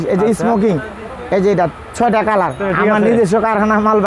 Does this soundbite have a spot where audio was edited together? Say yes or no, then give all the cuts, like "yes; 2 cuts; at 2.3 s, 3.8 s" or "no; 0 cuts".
yes; 1 cut; at 2.6 s